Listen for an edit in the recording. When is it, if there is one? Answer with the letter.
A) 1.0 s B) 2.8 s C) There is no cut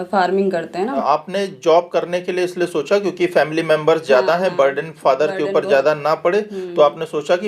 A